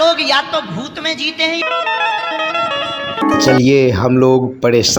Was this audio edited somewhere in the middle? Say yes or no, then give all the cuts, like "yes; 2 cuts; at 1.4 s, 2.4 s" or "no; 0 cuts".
yes; 2 cuts; at 1.6 s, 3.2 s